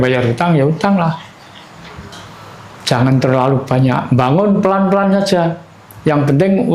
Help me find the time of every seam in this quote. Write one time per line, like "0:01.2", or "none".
none